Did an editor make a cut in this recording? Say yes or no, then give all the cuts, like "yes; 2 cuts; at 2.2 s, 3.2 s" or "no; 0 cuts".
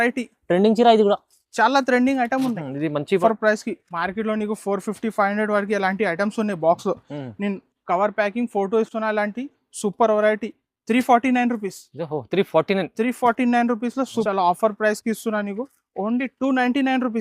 yes; 2 cuts; at 3.2 s, 14.3 s